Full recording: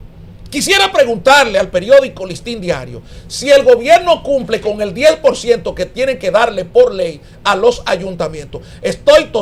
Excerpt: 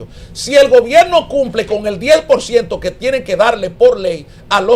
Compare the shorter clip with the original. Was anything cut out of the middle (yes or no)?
no